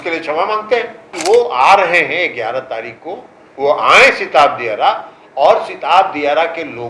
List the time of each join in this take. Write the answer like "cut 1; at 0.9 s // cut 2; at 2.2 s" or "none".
cut 1; at 1.1 s